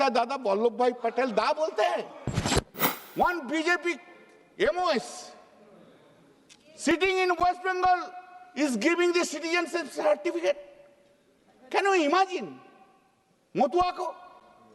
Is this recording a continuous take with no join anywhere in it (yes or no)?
no